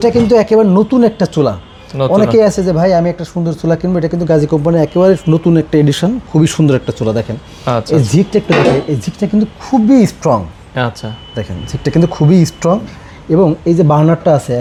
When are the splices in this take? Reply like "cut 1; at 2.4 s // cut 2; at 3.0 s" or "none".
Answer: none